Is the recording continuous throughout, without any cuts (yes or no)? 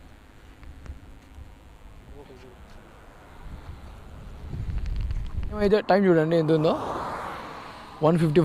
no